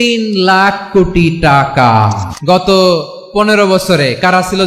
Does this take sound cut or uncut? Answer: cut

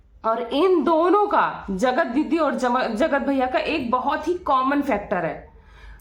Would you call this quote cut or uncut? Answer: uncut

